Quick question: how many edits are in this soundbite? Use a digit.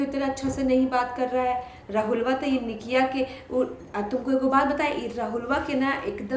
0